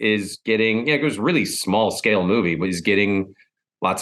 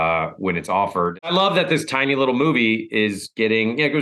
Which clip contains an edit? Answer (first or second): second